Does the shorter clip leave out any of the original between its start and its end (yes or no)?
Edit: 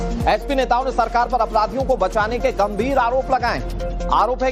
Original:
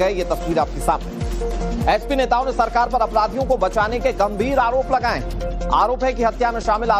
no